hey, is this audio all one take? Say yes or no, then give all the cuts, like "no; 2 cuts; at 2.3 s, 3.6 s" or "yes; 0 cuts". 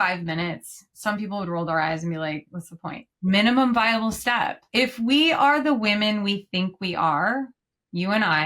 no; 2 cuts; at 3.2 s, 4.6 s